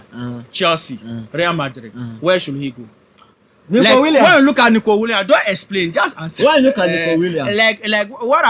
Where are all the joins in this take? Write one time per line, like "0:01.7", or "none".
none